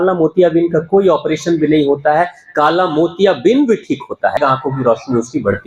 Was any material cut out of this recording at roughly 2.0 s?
no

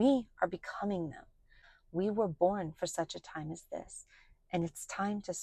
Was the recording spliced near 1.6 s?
yes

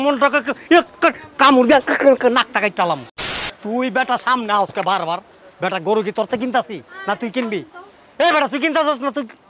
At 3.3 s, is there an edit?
yes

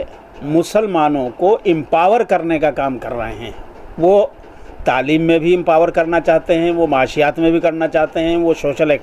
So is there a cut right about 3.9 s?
no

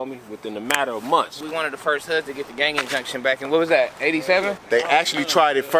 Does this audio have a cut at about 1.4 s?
yes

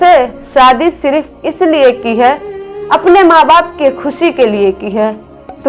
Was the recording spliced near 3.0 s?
no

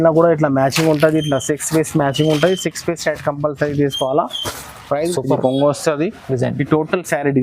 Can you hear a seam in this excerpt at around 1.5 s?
no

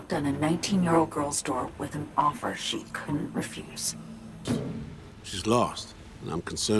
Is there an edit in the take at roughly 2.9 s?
no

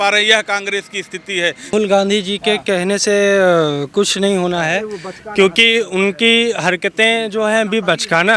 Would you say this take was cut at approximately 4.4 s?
no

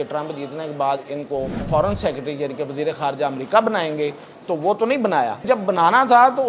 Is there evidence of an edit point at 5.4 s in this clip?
yes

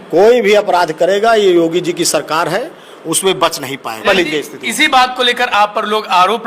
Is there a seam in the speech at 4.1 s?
yes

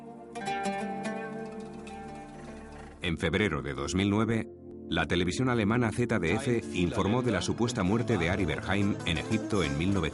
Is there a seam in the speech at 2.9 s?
yes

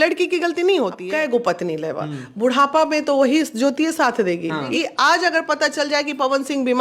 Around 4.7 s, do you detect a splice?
yes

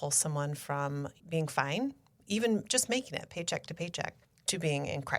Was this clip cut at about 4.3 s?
yes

